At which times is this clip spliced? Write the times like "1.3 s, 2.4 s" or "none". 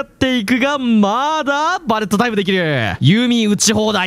3.0 s